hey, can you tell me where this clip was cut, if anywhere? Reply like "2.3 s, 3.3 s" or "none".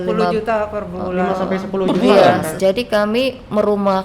2.5 s